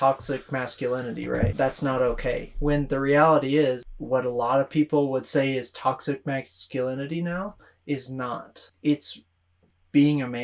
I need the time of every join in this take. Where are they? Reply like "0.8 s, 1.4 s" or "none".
1.5 s, 3.9 s, 8.7 s